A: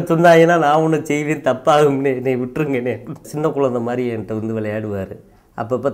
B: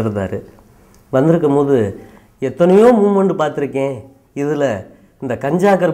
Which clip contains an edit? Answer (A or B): A